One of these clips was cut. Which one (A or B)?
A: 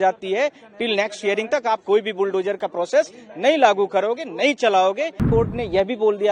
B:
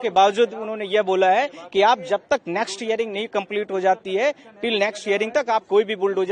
A